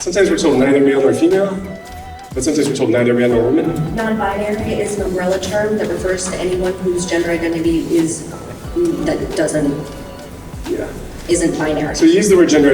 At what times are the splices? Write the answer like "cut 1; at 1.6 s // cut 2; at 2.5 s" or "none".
none

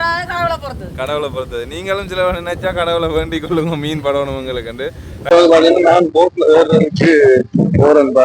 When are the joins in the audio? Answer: cut 1; at 5.2 s

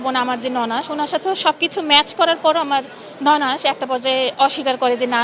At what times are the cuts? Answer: none

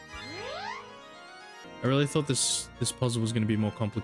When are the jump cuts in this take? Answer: cut 1; at 1.6 s

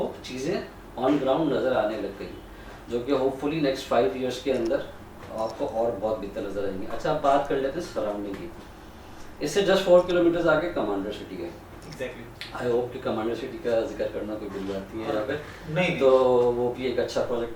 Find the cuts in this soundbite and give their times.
none

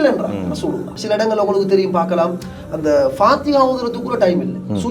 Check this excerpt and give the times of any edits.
cut 1; at 1.0 s

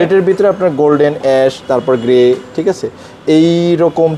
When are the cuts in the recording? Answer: none

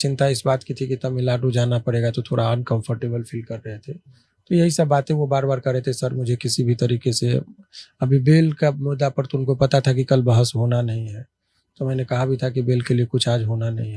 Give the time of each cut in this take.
none

